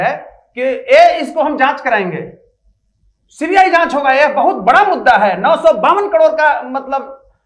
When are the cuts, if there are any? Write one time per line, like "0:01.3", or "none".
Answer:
none